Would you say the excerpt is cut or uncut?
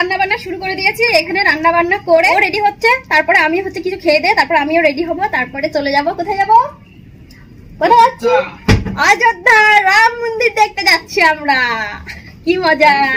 cut